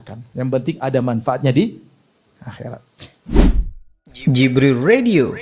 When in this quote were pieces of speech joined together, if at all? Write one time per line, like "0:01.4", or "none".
0:03.3